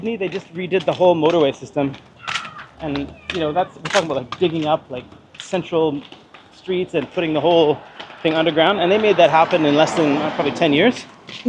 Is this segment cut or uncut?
uncut